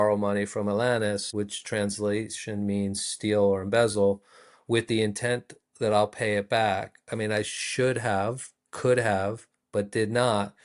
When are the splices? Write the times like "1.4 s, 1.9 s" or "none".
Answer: 1.3 s

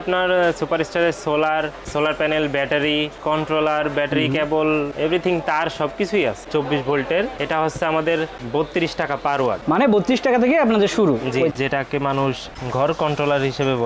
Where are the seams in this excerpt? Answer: 6.4 s, 11.5 s

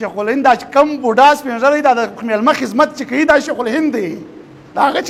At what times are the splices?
none

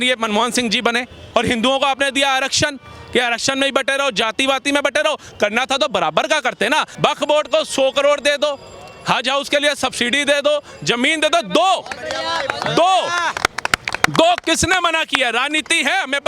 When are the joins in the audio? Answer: 1.2 s, 6.9 s

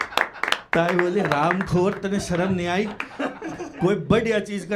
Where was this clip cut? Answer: none

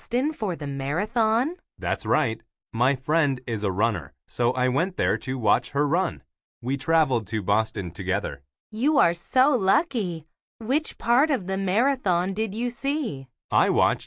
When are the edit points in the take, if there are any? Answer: 5.3 s

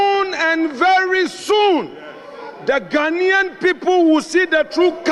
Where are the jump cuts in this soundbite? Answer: none

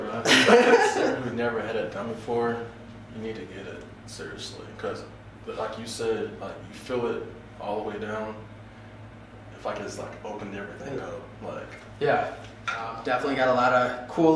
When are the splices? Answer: 1.0 s, 13.0 s

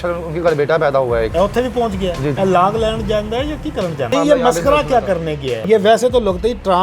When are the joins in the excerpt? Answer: 1.3 s, 2.4 s, 4.1 s, 5.6 s

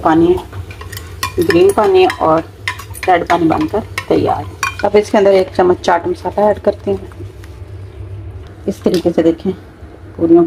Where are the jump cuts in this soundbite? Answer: 4.6 s

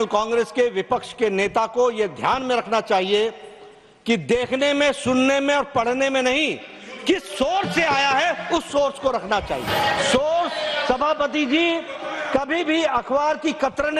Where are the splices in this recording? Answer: 9.7 s

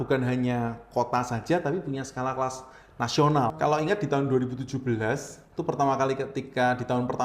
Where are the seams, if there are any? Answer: 3.5 s

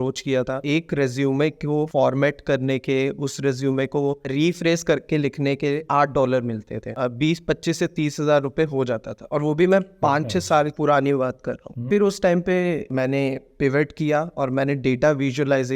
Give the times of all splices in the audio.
6.9 s, 11.8 s

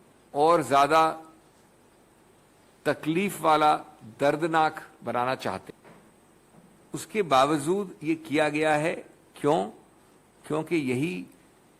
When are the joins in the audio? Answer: 5.7 s

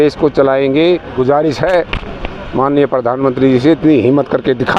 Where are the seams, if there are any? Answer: 1.2 s

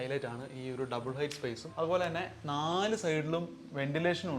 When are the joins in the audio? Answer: 1.6 s

